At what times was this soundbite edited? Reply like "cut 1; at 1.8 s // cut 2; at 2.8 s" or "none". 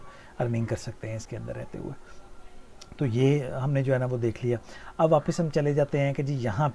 none

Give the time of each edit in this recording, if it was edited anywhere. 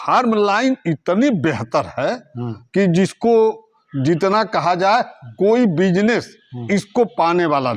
none

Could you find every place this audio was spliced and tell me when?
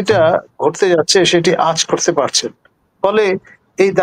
none

